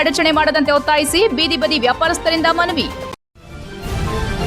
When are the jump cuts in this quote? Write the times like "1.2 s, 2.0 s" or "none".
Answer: 3.1 s